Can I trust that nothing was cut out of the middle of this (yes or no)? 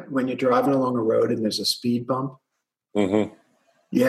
yes